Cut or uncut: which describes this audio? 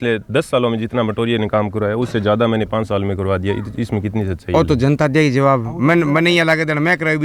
uncut